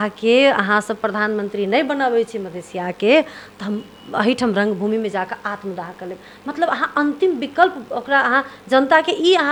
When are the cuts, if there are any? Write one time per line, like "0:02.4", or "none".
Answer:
none